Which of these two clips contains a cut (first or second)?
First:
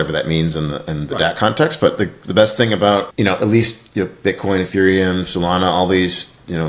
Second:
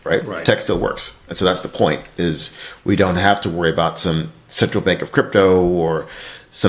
first